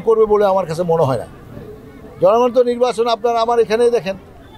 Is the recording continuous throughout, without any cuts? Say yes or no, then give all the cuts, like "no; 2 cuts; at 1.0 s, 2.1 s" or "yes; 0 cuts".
yes; 0 cuts